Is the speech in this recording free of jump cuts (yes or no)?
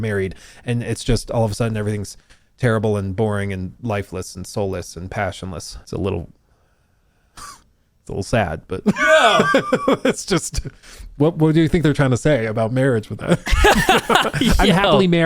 yes